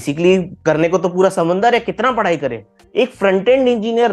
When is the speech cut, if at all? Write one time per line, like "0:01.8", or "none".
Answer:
0:02.7